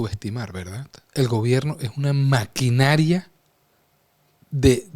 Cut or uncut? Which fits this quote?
uncut